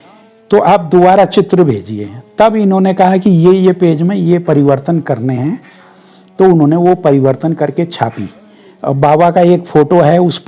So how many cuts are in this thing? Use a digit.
0